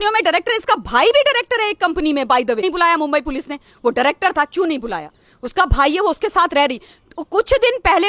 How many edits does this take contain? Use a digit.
1